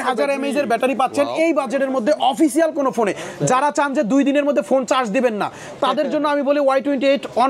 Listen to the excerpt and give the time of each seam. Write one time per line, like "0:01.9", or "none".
none